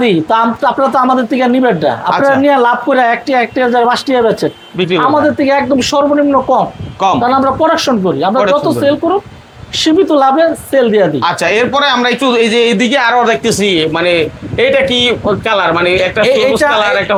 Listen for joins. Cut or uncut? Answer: uncut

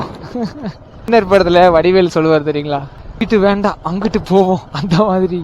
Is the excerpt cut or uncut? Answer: cut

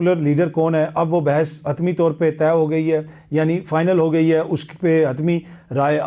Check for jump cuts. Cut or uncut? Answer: uncut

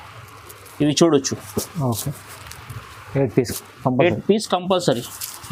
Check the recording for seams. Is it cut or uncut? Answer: uncut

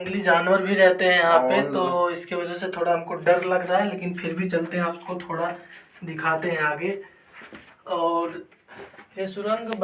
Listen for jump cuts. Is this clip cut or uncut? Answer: uncut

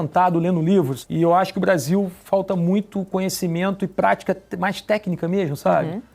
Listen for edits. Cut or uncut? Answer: cut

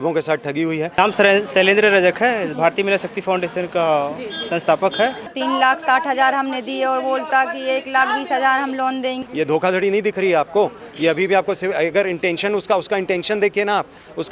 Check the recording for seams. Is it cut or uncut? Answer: cut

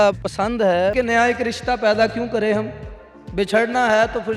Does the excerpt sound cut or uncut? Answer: cut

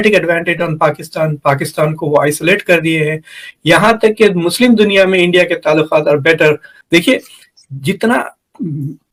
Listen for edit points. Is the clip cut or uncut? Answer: uncut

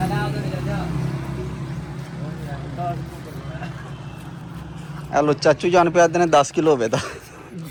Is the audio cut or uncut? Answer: uncut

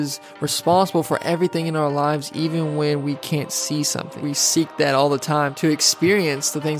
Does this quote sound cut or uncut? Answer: cut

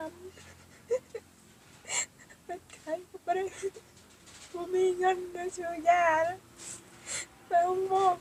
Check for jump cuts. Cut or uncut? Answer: uncut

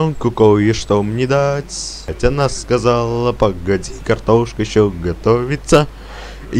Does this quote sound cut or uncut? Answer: cut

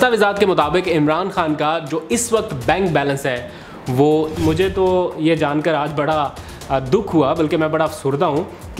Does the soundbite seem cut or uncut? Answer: cut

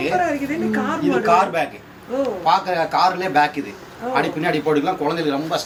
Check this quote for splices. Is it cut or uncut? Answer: uncut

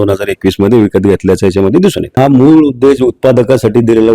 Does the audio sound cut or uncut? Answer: cut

